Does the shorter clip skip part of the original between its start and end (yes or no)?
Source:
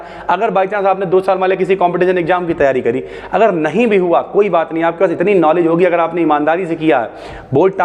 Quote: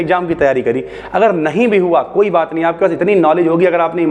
no